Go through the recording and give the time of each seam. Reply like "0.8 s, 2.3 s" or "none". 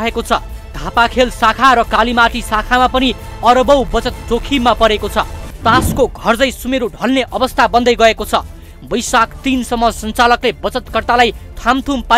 5.5 s